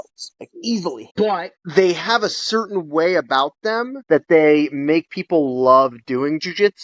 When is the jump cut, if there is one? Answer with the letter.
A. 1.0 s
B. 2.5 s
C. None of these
A